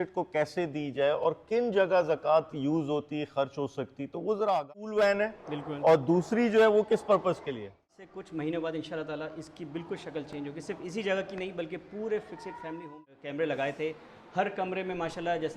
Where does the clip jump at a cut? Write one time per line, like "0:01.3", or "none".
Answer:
0:04.5
0:07.9
0:12.9